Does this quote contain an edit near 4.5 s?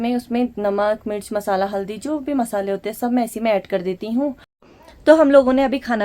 yes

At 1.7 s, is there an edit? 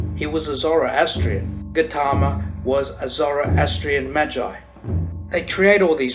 yes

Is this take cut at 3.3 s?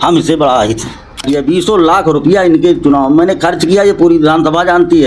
no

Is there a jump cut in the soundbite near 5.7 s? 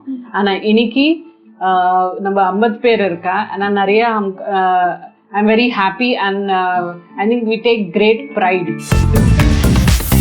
no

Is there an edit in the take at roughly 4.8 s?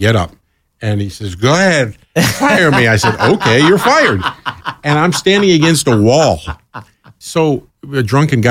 no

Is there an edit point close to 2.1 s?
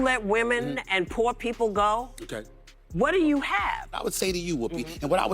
no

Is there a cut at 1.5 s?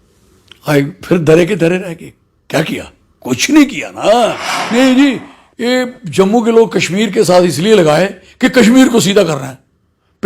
no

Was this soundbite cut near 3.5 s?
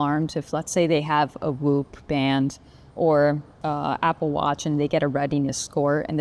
yes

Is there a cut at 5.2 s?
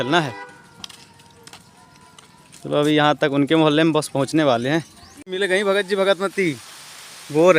yes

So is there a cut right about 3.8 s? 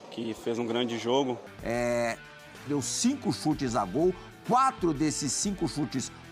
no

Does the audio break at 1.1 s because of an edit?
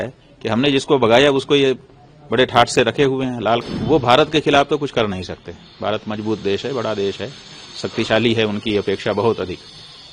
no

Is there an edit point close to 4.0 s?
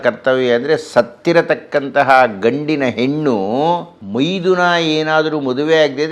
yes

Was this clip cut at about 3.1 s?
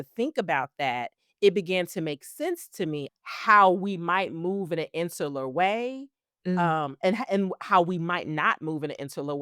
yes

